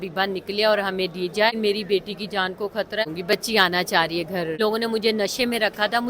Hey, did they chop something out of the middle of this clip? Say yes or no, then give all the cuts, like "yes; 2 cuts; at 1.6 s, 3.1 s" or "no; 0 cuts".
yes; 3 cuts; at 1.5 s, 3.0 s, 4.6 s